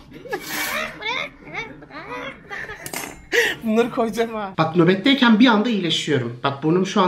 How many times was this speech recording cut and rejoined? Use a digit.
1